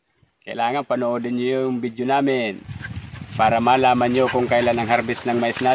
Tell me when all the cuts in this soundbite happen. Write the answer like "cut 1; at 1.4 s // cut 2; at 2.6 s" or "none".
cut 1; at 2.7 s